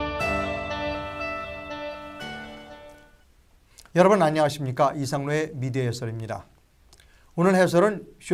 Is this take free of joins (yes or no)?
yes